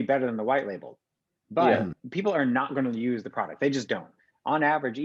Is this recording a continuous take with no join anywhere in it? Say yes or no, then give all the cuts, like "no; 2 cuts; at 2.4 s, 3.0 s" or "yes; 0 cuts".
no; 1 cut; at 2.0 s